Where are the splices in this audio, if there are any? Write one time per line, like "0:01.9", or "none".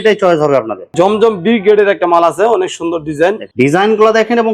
0:00.9
0:03.5

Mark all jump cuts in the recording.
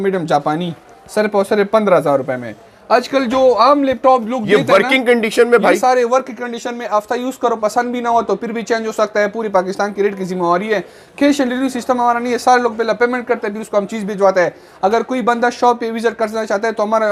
none

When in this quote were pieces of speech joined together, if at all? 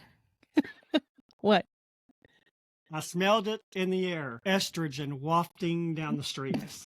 0:04.3

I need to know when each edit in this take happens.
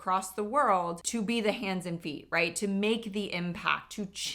0:01.0

